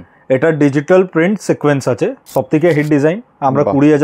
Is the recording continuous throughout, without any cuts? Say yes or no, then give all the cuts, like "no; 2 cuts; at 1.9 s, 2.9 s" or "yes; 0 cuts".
no; 1 cut; at 2.2 s